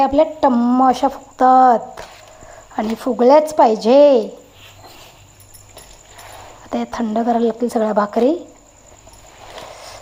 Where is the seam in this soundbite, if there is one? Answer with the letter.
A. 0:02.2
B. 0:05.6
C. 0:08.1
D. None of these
D